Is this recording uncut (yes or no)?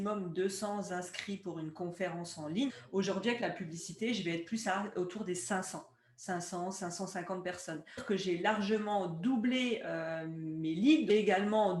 no